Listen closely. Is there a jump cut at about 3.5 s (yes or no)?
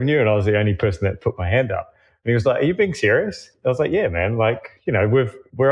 yes